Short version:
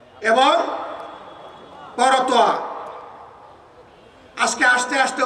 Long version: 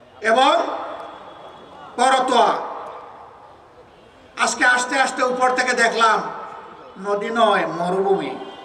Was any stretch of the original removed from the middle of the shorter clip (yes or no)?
no